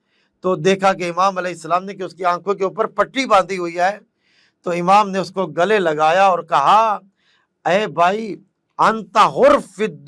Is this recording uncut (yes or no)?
yes